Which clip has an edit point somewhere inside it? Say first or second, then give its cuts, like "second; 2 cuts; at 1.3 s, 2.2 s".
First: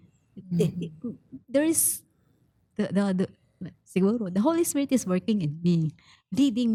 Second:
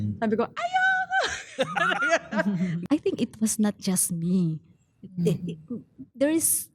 second; 1 cut; at 2.8 s